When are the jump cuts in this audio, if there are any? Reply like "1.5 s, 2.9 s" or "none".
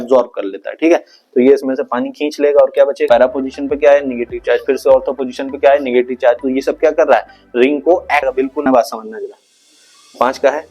3.1 s, 8.3 s